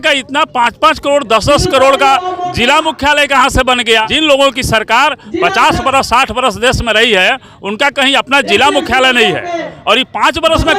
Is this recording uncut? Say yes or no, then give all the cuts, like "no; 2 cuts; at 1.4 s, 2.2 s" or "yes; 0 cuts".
no; 1 cut; at 4.1 s